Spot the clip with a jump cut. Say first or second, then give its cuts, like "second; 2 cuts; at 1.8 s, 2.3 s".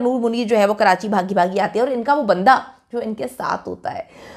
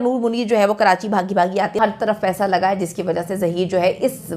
second; 1 cut; at 1.7 s